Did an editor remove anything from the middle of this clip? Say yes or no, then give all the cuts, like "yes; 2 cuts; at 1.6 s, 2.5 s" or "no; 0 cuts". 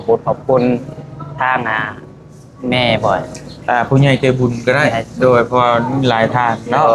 no; 0 cuts